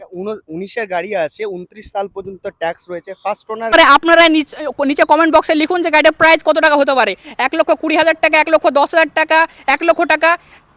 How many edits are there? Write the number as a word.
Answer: one